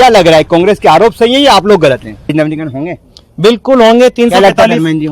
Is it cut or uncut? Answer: cut